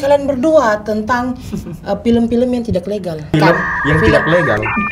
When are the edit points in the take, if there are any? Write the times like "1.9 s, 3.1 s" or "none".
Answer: 3.3 s